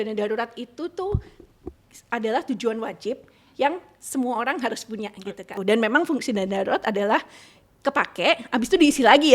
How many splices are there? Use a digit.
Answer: 1